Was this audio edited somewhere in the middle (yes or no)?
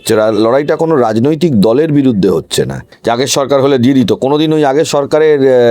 yes